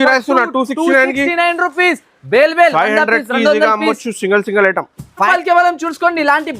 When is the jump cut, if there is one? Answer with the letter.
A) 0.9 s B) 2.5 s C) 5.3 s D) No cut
C